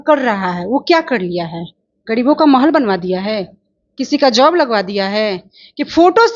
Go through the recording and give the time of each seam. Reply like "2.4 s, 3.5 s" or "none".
none